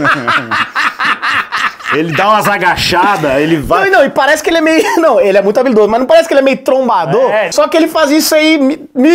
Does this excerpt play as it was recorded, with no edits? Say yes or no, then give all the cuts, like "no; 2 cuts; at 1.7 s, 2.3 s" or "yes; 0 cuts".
no; 1 cut; at 7.5 s